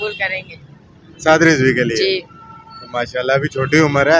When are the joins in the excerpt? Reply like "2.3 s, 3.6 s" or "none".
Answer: none